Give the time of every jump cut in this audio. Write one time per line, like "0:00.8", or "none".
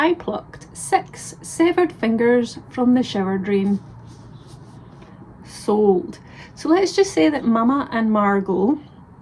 none